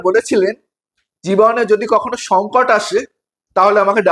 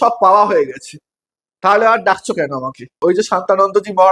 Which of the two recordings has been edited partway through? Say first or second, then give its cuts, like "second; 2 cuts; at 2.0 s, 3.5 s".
second; 1 cut; at 3.0 s